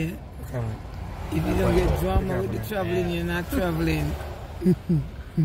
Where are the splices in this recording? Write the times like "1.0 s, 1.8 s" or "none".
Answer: none